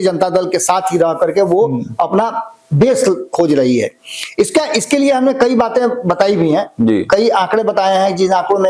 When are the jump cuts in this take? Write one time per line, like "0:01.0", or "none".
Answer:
none